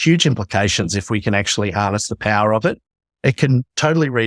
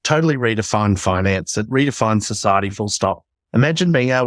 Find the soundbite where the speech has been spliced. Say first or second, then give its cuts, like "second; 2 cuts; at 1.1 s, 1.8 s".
second; 1 cut; at 1.7 s